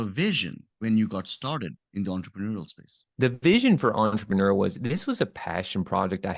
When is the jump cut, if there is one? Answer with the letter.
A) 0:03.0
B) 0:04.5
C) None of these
A